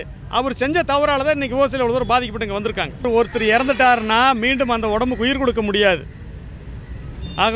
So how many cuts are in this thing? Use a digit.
1